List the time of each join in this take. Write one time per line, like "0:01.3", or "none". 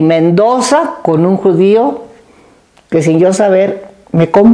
none